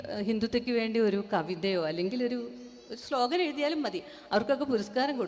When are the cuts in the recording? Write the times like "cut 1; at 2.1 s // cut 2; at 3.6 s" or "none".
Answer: none